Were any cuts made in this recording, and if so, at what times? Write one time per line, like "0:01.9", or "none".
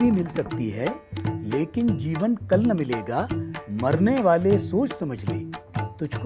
none